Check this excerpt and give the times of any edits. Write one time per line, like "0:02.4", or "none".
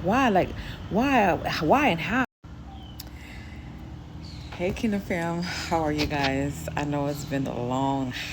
0:02.2